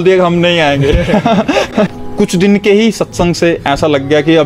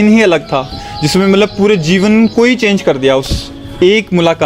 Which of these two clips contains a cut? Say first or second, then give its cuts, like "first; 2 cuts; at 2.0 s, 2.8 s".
first; 1 cut; at 2.0 s